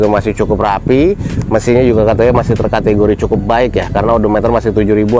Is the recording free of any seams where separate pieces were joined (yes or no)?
yes